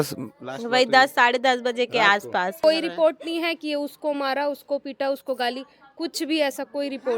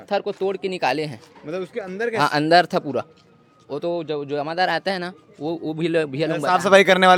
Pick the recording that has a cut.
first; 1 cut; at 2.6 s

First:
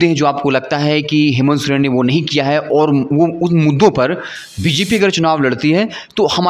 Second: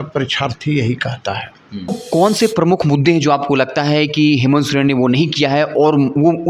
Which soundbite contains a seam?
second; 1 cut; at 2.0 s

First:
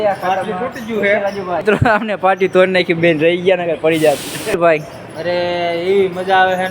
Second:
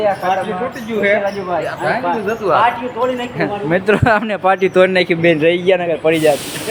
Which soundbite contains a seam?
first; 2 cuts; at 1.6 s, 4.6 s

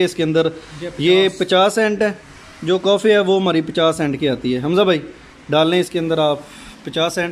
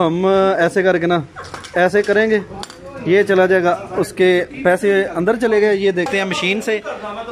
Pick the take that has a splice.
second; 1 cut; at 6.1 s

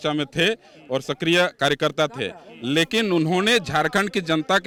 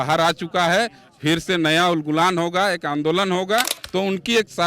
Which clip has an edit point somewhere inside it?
second; 1 cut; at 3.8 s

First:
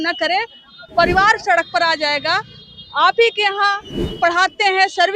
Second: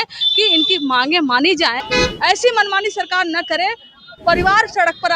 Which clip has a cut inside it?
second; 1 cut; at 1.8 s

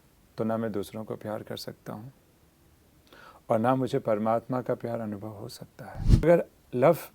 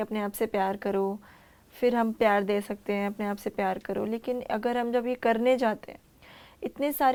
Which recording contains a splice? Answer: first; 1 cut; at 6.2 s

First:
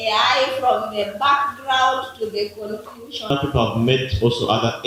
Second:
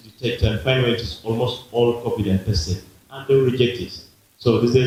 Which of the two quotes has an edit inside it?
first; 1 cut; at 3.3 s

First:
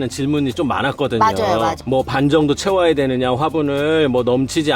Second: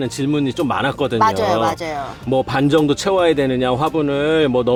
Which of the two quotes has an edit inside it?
first; 1 cut; at 1.8 s

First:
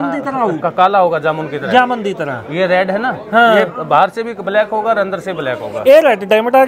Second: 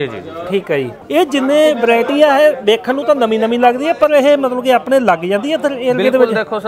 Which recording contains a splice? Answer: second; 1 cut; at 1.0 s

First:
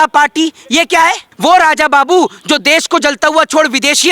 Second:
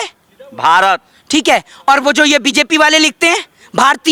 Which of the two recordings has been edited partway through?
first; 1 cut; at 1.3 s

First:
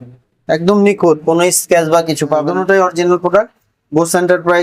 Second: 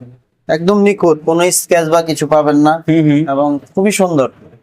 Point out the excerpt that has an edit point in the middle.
first; 1 cut; at 2.4 s

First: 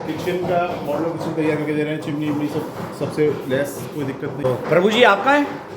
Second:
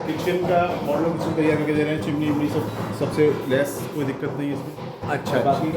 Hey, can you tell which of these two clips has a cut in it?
first; 1 cut; at 4.4 s

